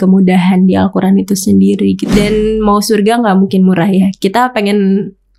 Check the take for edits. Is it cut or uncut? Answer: cut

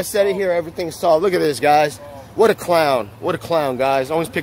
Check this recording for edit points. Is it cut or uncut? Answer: uncut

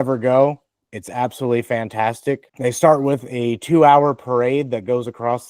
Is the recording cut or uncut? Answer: cut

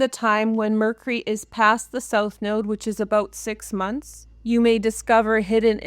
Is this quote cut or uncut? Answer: cut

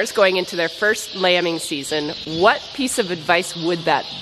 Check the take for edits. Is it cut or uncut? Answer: uncut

